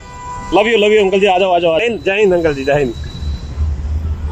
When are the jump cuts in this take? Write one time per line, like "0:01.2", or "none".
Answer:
0:01.8